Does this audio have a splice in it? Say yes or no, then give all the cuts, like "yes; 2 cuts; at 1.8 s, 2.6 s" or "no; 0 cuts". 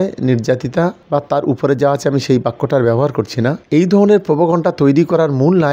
no; 0 cuts